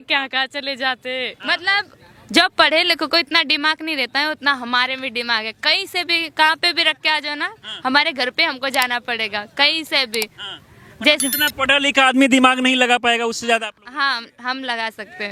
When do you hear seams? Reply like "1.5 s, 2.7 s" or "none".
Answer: none